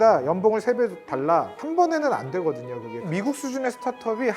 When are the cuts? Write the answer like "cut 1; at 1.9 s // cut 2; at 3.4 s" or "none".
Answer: cut 1; at 1.6 s // cut 2; at 3.1 s